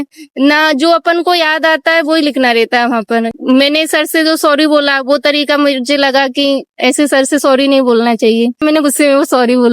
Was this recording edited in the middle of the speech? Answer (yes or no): yes